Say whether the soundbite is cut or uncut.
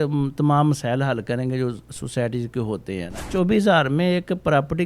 cut